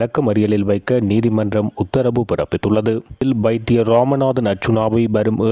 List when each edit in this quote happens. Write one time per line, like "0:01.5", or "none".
0:03.2